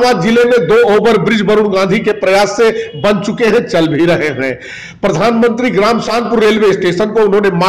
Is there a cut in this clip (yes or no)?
yes